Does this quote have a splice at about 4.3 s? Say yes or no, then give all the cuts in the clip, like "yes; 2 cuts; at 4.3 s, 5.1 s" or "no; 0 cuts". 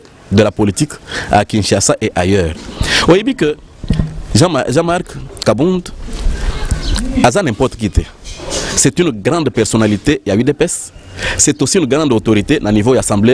no; 0 cuts